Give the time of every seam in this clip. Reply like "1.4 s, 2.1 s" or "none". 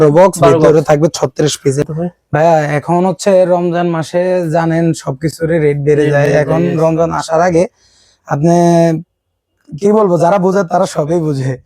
1.6 s